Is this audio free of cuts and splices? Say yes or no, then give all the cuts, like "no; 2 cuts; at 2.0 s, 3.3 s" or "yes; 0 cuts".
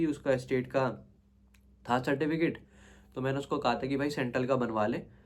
yes; 0 cuts